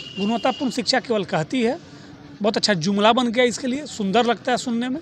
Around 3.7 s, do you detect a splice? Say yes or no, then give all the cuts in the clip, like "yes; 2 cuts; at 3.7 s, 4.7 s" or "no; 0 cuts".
no; 0 cuts